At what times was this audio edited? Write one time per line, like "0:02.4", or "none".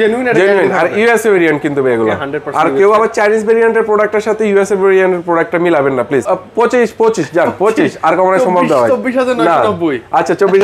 0:06.2